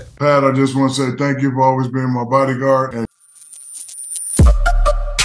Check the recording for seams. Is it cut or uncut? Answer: cut